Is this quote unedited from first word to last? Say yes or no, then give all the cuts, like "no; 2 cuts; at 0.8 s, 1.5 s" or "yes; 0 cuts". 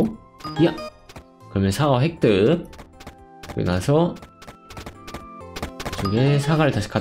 no; 1 cut; at 5.4 s